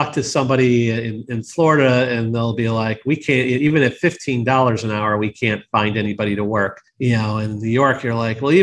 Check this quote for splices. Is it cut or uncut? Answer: uncut